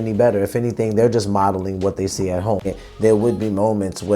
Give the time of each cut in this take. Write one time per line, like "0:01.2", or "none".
0:02.7